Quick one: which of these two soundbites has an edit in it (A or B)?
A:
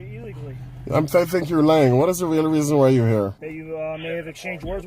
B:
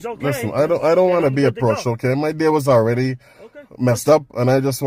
A